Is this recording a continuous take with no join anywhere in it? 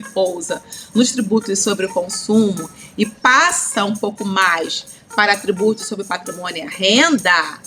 yes; 0 cuts

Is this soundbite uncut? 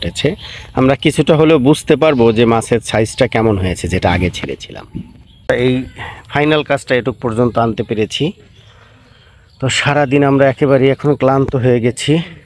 no; 1 cut; at 5.5 s

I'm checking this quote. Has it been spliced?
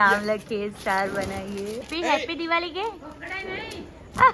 yes; 1 cut; at 1.9 s

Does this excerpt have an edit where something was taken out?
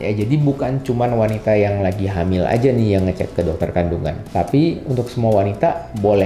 no; 0 cuts

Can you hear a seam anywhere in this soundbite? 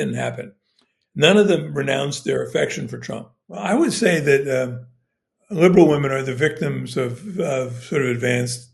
yes; 1 cut; at 3.6 s

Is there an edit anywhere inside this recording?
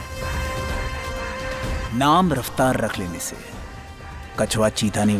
no; 0 cuts

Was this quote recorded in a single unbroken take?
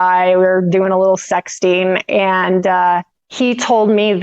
no; 1 cut; at 3.2 s

